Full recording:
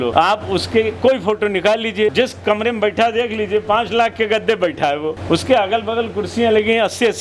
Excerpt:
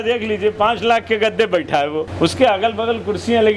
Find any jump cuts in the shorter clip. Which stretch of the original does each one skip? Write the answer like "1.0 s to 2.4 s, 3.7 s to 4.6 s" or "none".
none